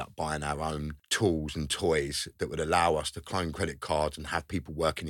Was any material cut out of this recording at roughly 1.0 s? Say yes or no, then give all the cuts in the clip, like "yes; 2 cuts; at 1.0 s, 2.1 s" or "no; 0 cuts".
yes; 1 cut; at 1.0 s